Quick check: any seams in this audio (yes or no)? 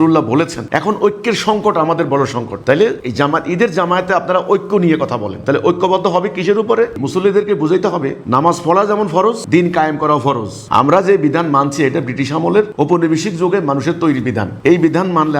yes